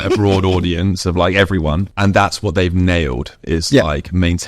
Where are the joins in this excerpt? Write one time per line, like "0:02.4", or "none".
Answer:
0:01.9